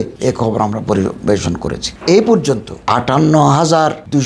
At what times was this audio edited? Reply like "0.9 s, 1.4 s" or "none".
1.9 s, 2.8 s